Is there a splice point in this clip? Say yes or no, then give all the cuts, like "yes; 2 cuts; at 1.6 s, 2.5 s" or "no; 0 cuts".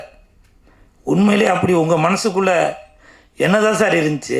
no; 0 cuts